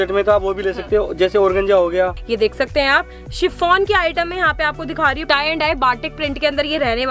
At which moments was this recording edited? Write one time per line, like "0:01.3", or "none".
0:02.2
0:05.3